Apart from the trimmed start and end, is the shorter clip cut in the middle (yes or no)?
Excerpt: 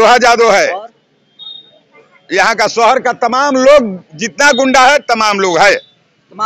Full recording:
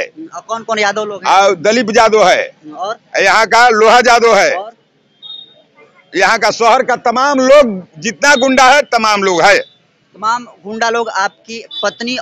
no